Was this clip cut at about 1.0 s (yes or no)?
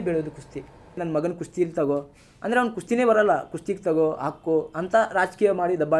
yes